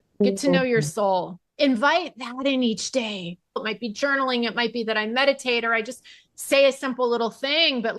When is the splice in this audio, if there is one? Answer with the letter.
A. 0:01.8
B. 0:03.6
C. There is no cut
B